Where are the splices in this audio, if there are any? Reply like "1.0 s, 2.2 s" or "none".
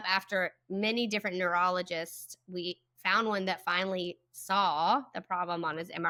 none